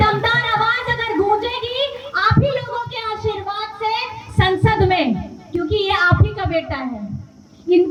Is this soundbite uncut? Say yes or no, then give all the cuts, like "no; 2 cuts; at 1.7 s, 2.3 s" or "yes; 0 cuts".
yes; 0 cuts